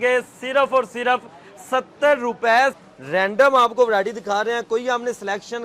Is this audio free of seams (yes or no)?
no